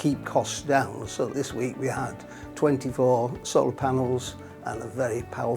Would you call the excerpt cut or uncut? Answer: cut